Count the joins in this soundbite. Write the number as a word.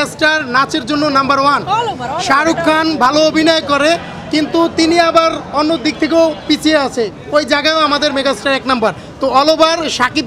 zero